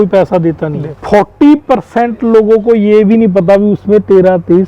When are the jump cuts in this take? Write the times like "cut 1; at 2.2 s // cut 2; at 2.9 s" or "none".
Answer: cut 1; at 0.9 s